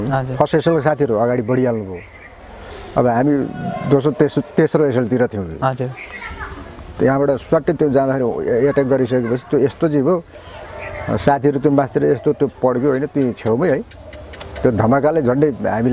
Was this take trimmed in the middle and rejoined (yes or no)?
no